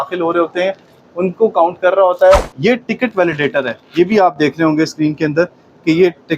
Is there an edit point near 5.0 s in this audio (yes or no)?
no